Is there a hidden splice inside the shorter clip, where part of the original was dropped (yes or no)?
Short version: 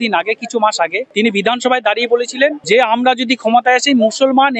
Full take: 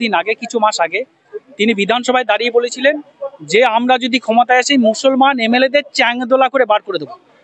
yes